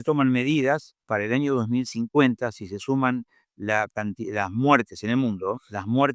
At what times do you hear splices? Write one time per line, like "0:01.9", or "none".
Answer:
0:00.9